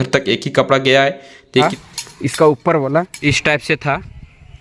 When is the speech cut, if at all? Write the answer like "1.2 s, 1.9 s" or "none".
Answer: 1.6 s, 3.2 s